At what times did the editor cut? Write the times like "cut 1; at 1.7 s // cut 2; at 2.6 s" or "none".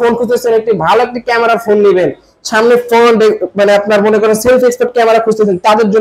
none